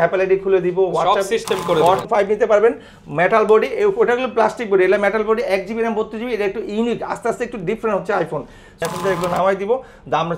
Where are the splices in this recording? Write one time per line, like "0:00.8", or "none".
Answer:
0:02.0
0:08.7